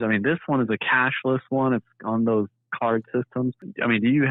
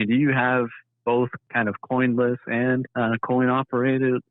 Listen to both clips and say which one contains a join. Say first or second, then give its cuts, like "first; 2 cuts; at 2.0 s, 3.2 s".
second; 2 cuts; at 1.4 s, 2.9 s